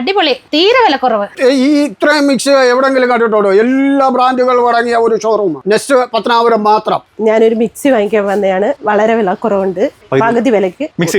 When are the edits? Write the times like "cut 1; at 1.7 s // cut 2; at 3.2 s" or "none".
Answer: cut 1; at 1.3 s // cut 2; at 7.1 s // cut 3; at 8.8 s